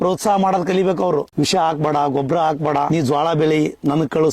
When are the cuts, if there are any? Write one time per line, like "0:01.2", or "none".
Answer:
0:01.3
0:02.9